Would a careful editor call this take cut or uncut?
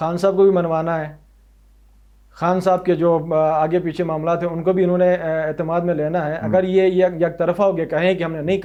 uncut